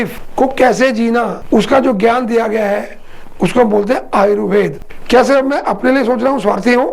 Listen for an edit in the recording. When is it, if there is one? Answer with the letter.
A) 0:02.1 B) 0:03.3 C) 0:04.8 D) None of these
C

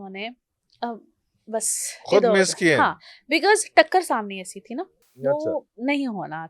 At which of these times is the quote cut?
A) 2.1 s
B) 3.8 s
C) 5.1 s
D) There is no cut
D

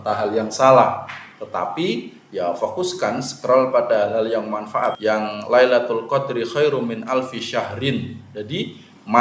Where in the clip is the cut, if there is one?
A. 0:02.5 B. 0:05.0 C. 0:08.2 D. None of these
B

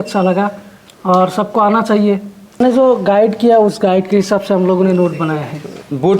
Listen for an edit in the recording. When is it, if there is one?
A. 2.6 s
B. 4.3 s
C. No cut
A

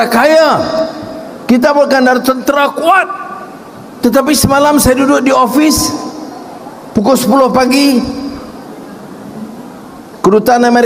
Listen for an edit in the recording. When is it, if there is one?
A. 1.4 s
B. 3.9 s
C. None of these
C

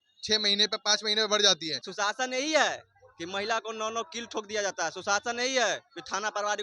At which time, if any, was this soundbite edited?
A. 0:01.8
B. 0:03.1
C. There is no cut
A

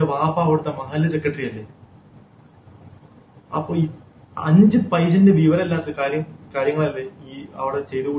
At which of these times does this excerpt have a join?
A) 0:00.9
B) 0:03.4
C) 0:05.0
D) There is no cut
D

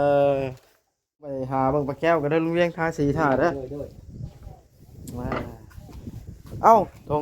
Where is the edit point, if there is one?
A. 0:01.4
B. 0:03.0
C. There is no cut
A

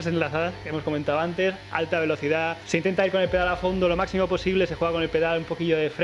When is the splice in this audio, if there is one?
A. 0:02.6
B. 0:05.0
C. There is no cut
A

